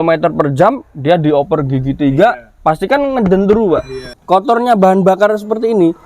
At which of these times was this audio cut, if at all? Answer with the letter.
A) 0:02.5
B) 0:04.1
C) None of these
B